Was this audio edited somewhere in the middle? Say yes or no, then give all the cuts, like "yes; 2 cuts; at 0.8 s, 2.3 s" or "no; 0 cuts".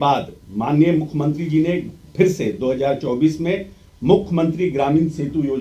no; 0 cuts